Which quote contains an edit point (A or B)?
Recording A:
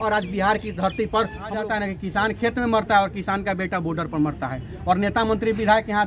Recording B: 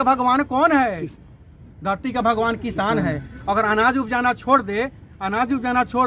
A